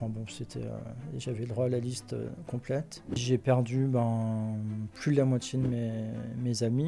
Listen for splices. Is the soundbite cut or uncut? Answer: cut